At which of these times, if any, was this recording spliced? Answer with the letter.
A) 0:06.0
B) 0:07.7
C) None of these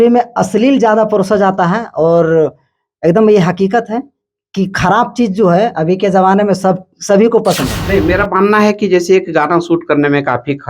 B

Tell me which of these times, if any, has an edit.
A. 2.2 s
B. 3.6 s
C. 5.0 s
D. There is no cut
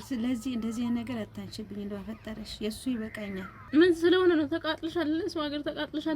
B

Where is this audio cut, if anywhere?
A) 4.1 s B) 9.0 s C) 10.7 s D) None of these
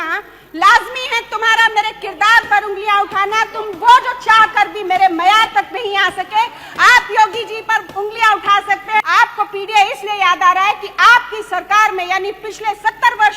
B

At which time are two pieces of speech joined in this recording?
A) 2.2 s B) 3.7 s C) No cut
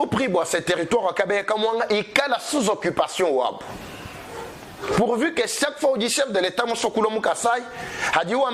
C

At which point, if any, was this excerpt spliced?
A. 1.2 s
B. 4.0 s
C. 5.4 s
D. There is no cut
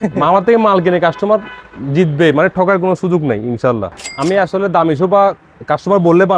B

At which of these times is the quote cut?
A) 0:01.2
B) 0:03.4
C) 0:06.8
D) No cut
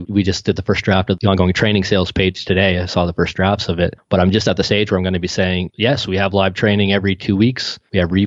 A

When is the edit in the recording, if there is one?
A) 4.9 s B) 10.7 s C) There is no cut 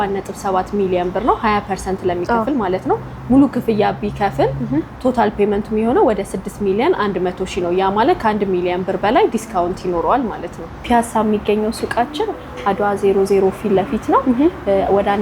B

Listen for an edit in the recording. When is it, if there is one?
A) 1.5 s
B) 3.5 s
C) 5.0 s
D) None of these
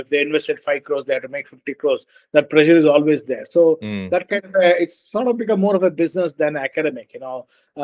D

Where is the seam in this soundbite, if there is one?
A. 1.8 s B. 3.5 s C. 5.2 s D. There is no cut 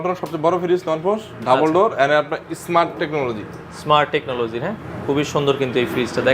D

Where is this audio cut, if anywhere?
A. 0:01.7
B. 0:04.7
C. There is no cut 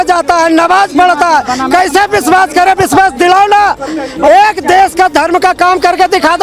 C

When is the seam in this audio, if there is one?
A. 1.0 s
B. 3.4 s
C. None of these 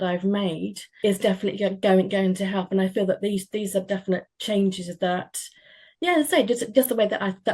A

